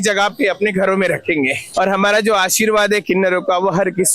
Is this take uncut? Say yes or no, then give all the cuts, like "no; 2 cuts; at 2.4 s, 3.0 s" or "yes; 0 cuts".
no; 1 cut; at 1.7 s